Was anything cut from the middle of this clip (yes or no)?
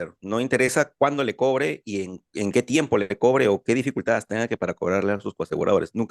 no